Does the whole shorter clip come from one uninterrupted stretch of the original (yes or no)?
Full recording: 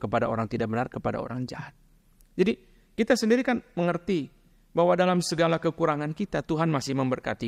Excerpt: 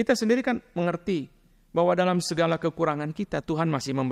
yes